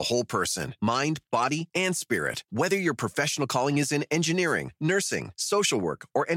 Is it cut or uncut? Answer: uncut